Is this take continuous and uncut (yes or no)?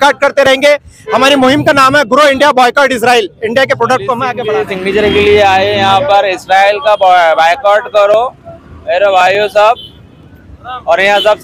no